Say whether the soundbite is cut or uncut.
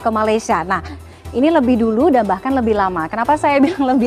uncut